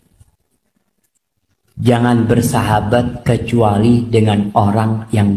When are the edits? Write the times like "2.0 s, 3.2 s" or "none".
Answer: none